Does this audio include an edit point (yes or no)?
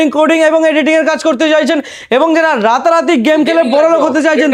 no